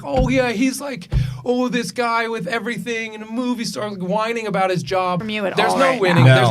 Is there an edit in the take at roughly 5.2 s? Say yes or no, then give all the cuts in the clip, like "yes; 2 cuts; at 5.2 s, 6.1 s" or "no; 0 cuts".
yes; 1 cut; at 5.2 s